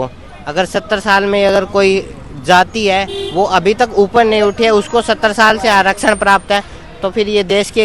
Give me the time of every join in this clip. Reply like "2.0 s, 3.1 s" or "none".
none